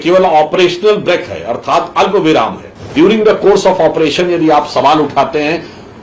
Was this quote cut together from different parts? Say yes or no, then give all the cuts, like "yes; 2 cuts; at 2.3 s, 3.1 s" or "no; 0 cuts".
yes; 1 cut; at 2.9 s